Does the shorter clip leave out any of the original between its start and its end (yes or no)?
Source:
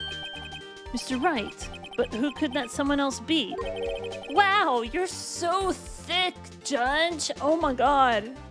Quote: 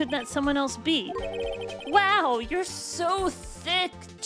no